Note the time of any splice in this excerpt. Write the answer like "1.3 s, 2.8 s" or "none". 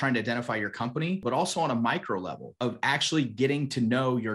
1.2 s, 2.6 s